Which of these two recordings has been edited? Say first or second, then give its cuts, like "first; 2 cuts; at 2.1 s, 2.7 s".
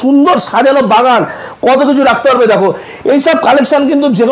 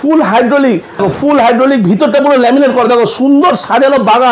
second; 1 cut; at 1.0 s